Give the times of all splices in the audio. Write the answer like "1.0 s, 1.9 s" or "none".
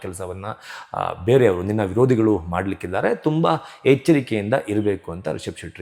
none